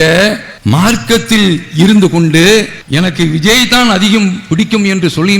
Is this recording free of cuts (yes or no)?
no